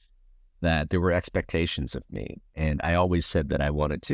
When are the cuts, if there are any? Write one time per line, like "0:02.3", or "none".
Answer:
0:02.5